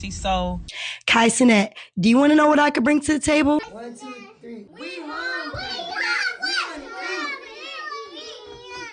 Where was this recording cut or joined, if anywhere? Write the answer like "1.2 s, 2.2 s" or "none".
0.9 s, 3.7 s